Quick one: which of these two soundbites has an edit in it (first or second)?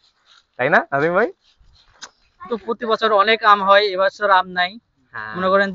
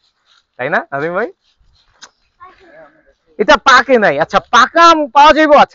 first